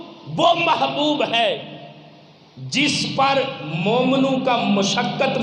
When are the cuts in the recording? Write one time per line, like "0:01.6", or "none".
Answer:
none